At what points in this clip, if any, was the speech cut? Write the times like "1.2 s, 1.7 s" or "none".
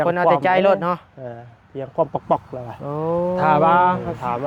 3.4 s

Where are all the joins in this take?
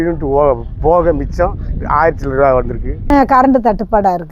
3.0 s

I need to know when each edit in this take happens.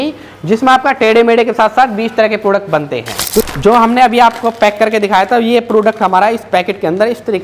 3.4 s

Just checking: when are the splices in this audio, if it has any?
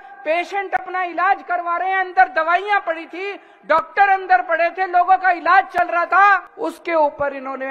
6.5 s

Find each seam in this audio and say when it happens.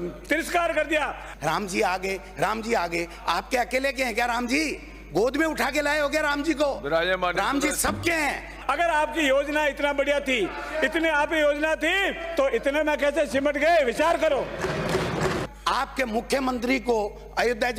1.2 s, 8.5 s, 15.5 s

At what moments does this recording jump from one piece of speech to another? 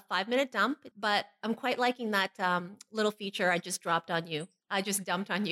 0.9 s, 2.0 s, 4.6 s

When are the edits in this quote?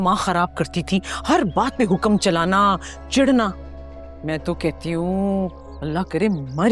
none

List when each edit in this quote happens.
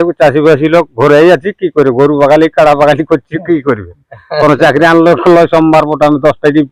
none

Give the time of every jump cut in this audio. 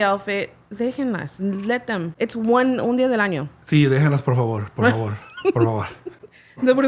2.1 s

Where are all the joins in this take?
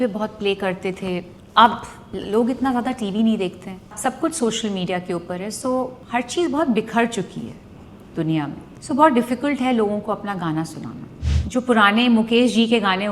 3.9 s, 6.0 s, 8.7 s, 11.2 s

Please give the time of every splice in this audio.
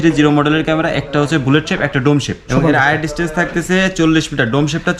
2.5 s

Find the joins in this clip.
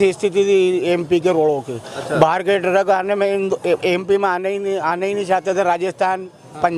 none

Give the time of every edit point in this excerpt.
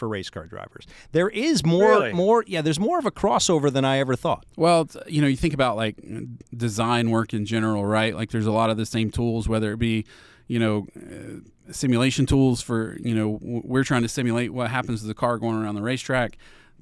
none

